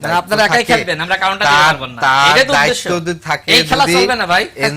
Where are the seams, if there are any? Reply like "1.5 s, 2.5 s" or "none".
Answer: none